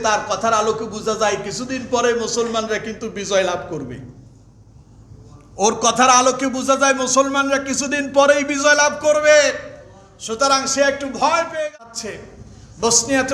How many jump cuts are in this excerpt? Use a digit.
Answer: 1